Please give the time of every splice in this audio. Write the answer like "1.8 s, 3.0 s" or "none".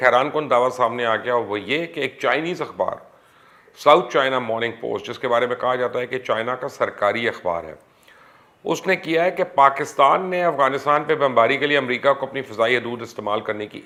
none